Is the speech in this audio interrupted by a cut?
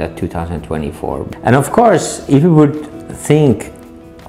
yes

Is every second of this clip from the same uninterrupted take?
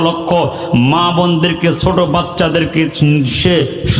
yes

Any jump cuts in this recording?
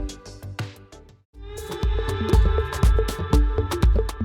yes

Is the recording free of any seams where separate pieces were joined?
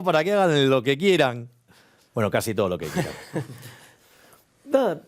yes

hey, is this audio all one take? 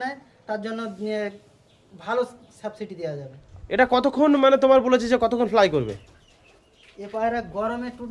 no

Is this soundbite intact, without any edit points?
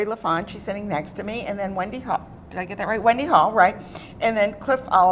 no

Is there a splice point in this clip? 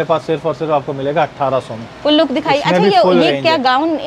no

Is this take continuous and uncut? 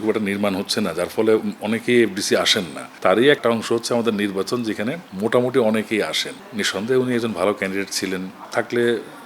no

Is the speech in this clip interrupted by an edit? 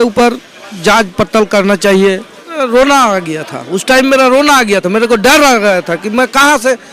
yes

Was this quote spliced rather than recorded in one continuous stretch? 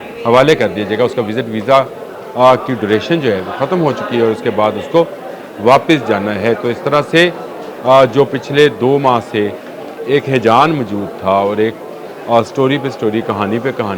no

